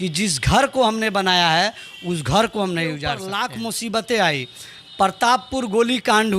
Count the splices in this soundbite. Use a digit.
1